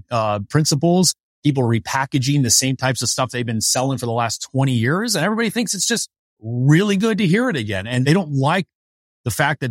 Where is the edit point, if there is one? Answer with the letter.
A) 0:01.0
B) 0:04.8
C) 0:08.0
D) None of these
C